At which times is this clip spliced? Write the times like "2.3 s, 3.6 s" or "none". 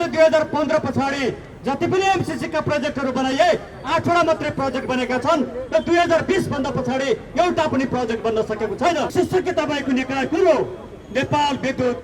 9.1 s